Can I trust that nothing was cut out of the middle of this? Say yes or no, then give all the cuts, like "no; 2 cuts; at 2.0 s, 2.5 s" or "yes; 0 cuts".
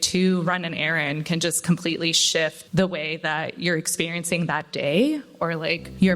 no; 1 cut; at 2.6 s